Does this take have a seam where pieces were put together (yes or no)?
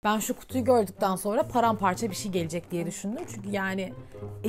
no